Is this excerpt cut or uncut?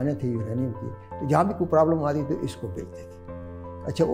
uncut